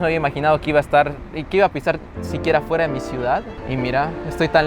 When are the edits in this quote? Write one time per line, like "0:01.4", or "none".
0:03.6